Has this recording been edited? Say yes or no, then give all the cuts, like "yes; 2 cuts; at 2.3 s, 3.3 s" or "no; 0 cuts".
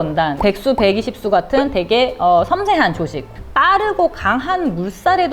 yes; 1 cut; at 3.2 s